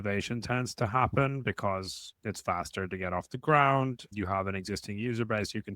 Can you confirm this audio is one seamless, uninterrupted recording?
no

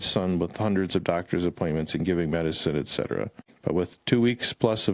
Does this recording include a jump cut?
yes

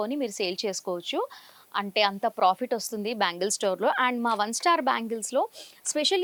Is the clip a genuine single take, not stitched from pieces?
yes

